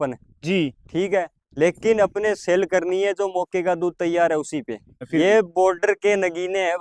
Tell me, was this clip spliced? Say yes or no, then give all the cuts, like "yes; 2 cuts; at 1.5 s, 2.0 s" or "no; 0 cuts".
yes; 1 cut; at 5.0 s